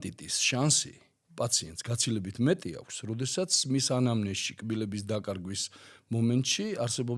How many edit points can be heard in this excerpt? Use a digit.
0